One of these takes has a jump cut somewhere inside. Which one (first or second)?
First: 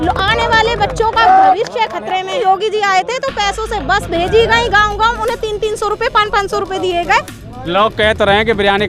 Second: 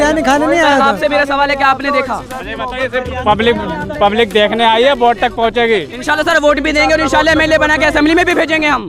first